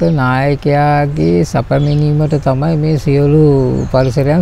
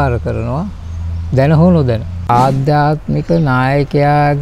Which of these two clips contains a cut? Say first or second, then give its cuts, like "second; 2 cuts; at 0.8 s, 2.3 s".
second; 1 cut; at 2.2 s